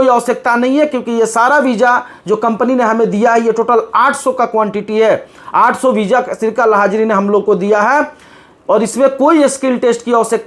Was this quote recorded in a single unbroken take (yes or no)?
yes